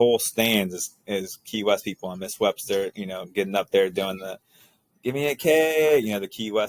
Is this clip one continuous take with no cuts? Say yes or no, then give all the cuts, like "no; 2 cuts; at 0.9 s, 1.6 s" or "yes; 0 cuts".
yes; 0 cuts